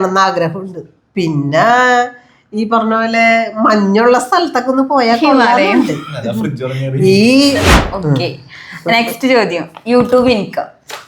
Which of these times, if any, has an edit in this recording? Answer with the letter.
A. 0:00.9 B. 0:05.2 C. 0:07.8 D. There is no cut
C